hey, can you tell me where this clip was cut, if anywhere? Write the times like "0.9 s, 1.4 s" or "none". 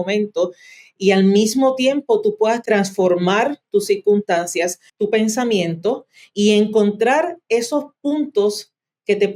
2.6 s, 4.9 s